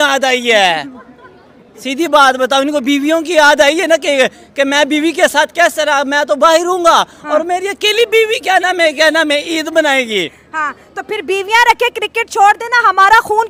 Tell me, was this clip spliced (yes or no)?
no